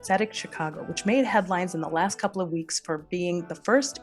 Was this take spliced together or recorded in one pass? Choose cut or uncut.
uncut